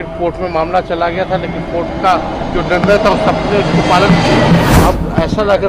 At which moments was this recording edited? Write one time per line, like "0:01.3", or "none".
0:04.8